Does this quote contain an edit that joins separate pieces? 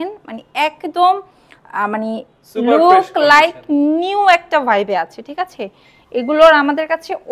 no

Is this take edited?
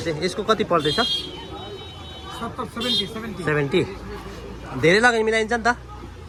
no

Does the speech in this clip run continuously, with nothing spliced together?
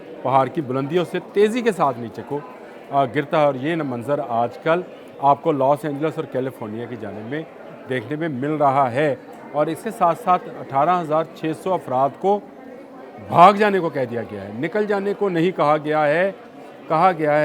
yes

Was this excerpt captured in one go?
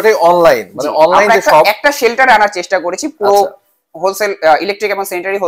yes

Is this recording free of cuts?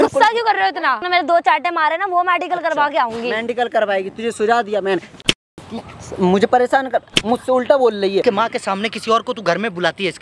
no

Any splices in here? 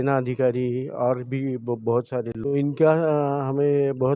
yes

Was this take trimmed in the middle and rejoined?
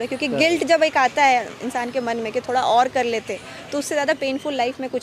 no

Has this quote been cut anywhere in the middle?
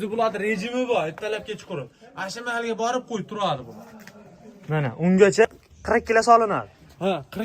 yes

